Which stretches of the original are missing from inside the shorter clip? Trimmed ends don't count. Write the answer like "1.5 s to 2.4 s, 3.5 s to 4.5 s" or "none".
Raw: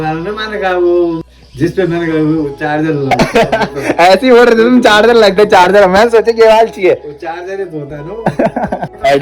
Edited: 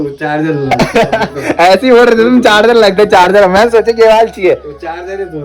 none

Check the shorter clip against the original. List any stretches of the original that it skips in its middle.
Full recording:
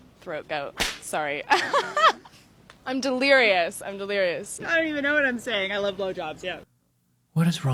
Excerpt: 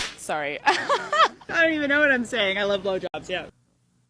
2.3 s to 4.6 s

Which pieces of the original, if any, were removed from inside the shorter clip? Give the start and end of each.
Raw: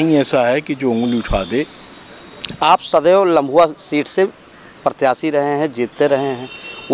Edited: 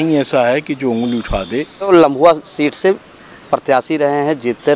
1.9 s to 3.2 s

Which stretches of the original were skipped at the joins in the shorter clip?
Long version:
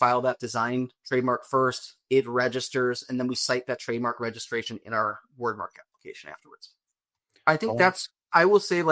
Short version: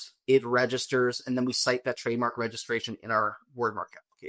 none

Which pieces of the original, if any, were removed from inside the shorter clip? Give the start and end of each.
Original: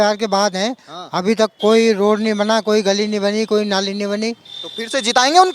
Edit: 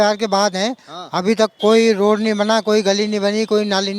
none

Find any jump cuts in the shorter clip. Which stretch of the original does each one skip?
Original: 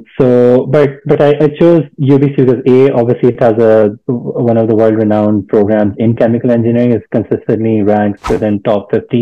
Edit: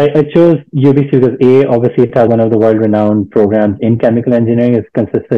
3.5 s to 4.5 s

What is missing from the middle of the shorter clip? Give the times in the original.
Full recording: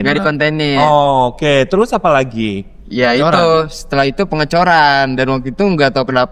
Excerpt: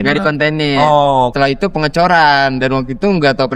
1.3 s to 3.9 s

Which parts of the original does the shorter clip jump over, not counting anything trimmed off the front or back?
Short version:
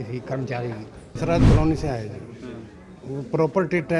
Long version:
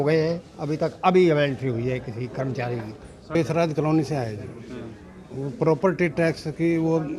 3.3 s to 3.5 s

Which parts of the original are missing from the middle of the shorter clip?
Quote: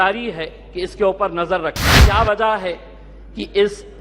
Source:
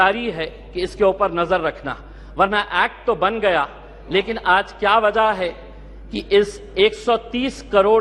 2.0 s to 4.7 s

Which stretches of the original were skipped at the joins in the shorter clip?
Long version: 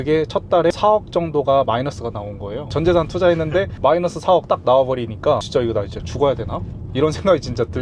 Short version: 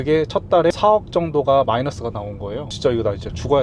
2.7 s to 5.4 s

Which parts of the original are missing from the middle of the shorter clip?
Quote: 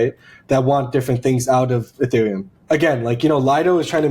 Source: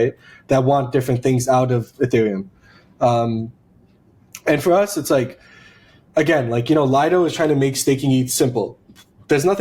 2.5 s to 6.0 s

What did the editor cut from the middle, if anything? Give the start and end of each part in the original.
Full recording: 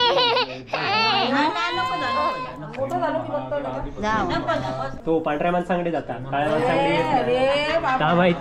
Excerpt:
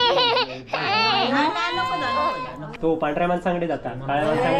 2.7 s to 4.9 s

